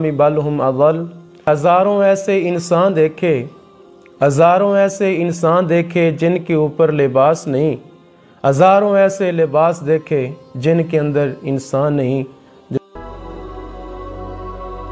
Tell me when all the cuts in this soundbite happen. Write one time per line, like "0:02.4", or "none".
0:01.5
0:12.8